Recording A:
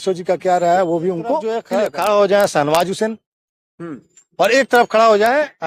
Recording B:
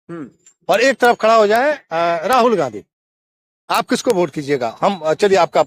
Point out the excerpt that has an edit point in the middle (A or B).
A